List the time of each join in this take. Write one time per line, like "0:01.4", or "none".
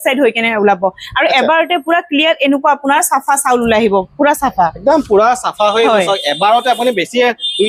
none